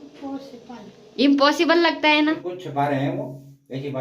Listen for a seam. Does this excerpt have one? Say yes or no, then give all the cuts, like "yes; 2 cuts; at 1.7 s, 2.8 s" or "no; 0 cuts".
yes; 1 cut; at 2.5 s